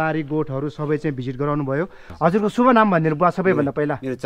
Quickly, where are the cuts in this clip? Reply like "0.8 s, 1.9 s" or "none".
2.1 s